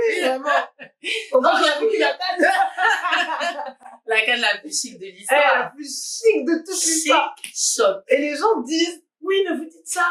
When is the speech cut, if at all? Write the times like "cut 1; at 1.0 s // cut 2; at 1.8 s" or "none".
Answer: none